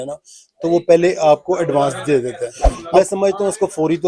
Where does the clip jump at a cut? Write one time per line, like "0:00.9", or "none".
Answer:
0:03.0